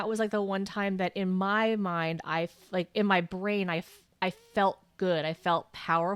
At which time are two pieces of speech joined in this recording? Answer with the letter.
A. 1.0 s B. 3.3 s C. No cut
C